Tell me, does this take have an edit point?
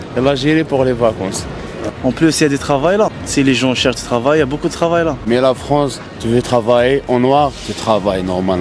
yes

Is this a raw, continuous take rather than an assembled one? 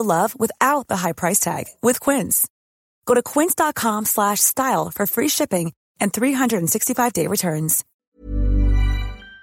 no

